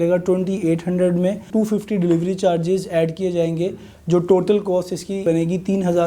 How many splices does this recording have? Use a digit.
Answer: 2